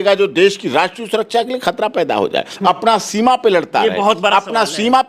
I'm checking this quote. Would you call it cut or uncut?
uncut